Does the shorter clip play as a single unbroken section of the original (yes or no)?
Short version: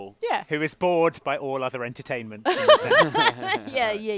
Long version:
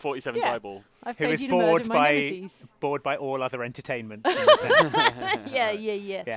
no